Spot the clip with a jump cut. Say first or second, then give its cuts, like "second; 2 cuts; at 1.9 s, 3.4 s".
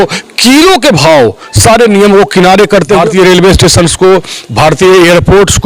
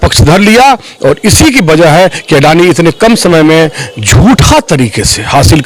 first; 1 cut; at 3.0 s